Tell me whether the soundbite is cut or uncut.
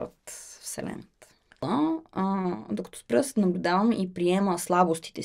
cut